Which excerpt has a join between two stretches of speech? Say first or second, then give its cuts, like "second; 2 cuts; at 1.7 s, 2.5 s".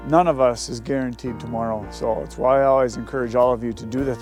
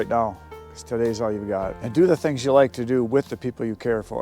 second; 1 cut; at 1.8 s